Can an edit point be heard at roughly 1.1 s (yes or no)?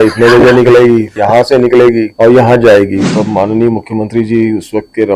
yes